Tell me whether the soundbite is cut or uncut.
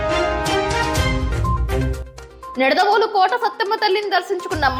uncut